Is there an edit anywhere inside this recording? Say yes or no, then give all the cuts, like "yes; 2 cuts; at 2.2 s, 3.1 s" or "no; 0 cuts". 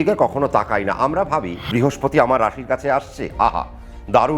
yes; 1 cut; at 1.6 s